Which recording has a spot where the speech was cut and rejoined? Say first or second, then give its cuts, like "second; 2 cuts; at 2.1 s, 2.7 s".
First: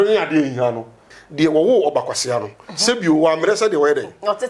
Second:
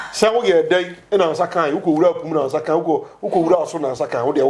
first; 1 cut; at 1.1 s